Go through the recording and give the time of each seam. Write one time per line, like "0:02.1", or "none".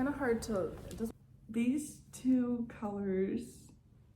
0:01.1